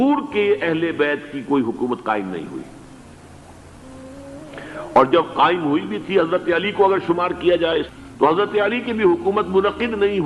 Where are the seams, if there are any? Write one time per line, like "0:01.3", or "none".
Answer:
0:07.9